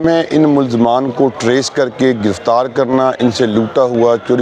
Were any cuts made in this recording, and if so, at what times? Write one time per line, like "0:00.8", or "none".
none